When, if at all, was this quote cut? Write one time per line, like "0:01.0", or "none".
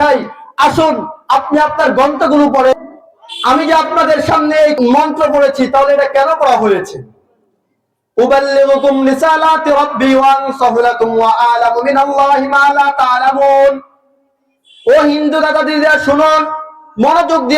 0:02.8
0:04.8